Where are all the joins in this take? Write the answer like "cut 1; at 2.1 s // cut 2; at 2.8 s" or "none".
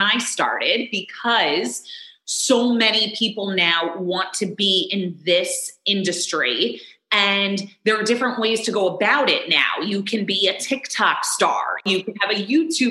cut 1; at 11.8 s